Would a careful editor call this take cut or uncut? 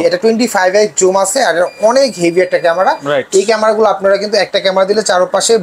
uncut